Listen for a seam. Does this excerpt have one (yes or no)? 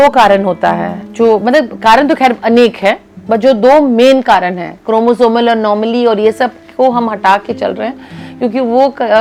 no